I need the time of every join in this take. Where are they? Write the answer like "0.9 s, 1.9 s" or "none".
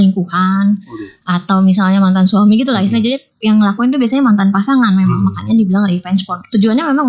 none